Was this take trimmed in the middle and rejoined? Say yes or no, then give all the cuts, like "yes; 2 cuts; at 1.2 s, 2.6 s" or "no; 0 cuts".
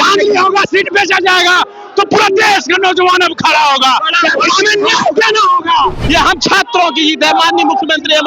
yes; 1 cut; at 6.0 s